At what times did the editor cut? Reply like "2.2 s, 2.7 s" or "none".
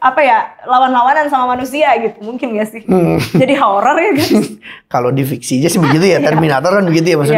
none